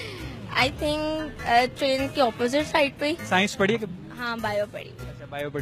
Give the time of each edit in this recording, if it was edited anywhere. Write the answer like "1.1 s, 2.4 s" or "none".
3.2 s

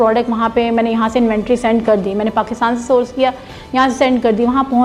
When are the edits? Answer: none

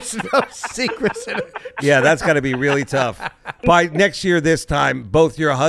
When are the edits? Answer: 3.5 s

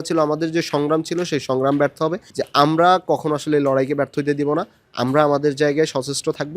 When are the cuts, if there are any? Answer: 2.3 s

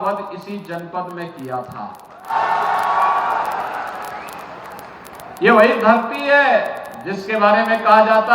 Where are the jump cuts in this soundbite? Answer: 2.3 s

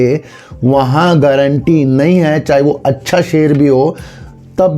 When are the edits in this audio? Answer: none

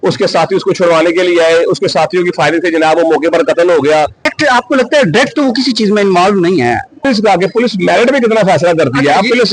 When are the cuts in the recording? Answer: 4.2 s, 7.0 s

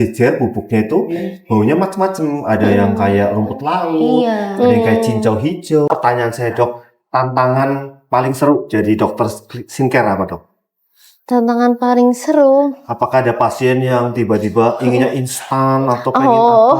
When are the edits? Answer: 5.9 s

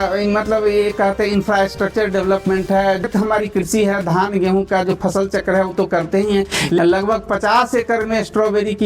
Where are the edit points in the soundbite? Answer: 3.0 s, 6.8 s

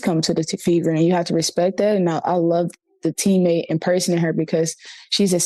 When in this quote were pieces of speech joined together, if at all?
2.1 s

